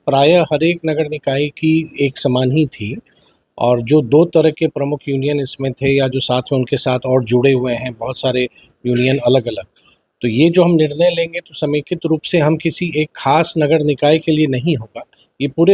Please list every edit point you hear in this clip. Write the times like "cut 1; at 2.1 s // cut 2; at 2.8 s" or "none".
none